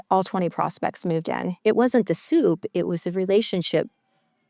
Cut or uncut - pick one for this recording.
cut